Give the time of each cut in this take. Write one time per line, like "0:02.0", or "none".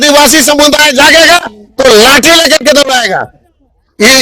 none